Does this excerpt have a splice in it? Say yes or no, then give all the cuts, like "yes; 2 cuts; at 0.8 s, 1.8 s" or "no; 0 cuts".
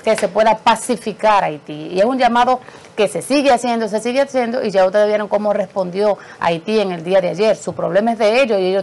no; 0 cuts